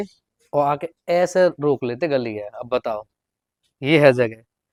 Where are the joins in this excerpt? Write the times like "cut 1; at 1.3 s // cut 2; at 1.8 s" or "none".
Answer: none